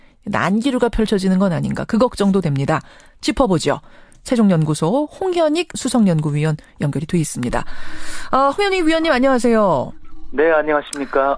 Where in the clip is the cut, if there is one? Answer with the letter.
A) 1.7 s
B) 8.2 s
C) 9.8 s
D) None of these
C